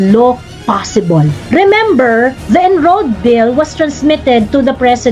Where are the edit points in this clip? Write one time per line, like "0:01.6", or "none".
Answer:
0:01.4
0:02.4